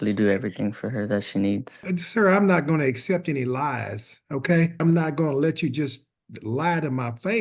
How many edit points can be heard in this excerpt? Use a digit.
2